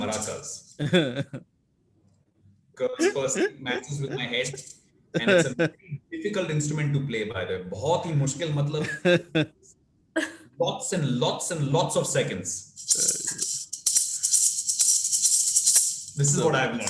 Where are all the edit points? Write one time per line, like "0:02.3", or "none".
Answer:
none